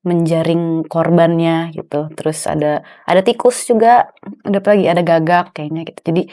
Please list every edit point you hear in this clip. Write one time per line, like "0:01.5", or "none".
none